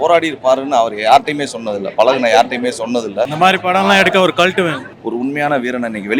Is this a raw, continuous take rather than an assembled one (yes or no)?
no